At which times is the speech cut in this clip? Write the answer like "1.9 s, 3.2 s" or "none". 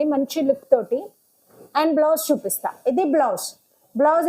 none